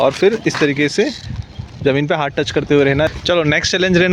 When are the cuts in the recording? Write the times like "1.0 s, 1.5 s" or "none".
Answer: 3.1 s